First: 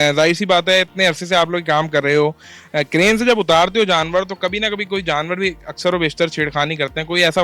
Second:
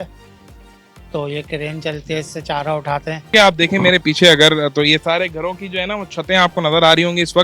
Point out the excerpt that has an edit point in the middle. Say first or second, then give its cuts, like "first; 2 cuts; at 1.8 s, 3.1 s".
second; 1 cut; at 3.3 s